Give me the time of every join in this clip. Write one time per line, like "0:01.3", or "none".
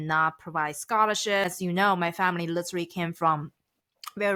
none

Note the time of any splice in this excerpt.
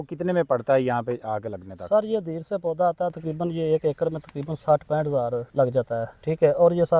0:05.4

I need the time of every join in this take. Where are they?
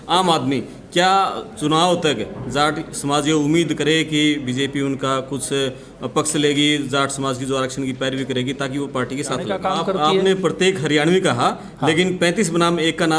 0:09.5

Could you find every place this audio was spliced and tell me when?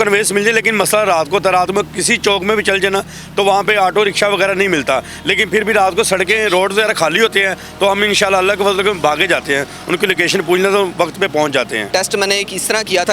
0:11.9

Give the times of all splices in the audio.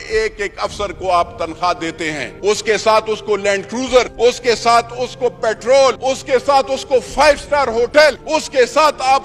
0:02.2
0:04.1
0:06.0
0:08.2

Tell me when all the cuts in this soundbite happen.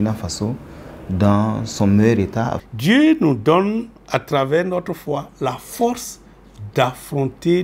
0:02.6

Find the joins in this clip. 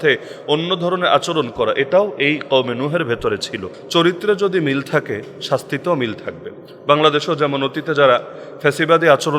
0:03.7

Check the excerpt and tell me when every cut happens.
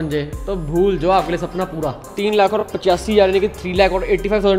0:02.1

